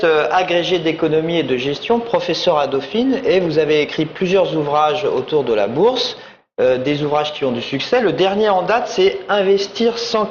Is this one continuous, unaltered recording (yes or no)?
yes